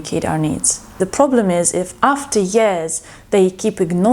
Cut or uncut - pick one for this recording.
cut